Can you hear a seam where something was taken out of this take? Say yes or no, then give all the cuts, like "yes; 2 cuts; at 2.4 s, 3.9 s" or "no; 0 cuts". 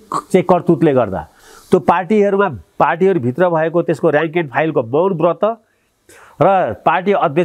no; 0 cuts